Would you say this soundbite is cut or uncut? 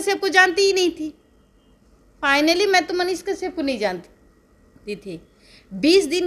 uncut